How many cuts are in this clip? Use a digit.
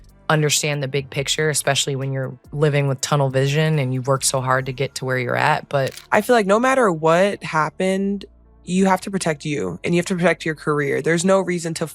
1